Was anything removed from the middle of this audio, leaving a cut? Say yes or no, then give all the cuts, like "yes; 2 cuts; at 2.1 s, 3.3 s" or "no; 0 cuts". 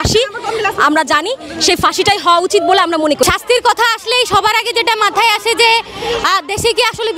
yes; 1 cut; at 3.2 s